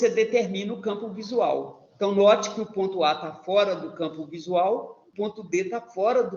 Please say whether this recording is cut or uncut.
cut